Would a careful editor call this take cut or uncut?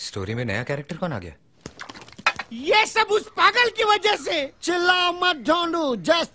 uncut